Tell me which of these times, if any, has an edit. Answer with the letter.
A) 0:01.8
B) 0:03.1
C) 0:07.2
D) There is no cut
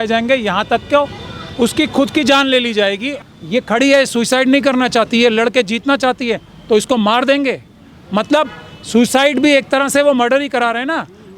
B